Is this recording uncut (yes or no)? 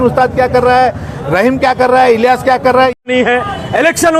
no